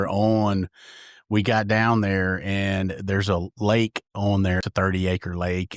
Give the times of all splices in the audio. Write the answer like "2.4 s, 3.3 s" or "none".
4.7 s